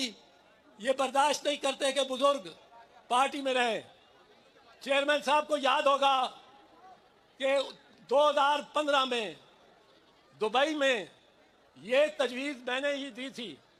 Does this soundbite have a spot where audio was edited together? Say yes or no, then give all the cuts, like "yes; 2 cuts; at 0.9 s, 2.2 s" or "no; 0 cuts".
no; 0 cuts